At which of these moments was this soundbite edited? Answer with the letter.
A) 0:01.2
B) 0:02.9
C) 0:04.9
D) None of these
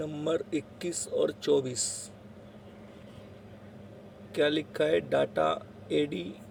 D